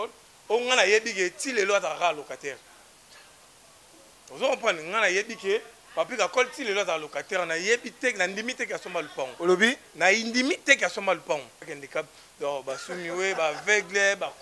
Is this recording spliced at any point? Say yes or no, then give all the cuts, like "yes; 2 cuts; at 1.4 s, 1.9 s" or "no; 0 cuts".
yes; 1 cut; at 11.8 s